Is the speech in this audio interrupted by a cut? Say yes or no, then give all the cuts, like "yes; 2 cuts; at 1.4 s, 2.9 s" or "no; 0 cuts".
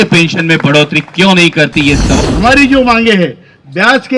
yes; 1 cut; at 2.2 s